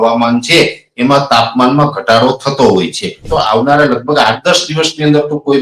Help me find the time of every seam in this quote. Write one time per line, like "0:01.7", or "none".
0:03.3